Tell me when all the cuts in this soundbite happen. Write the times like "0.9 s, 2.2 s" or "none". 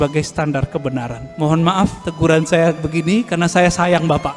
1.2 s, 2.0 s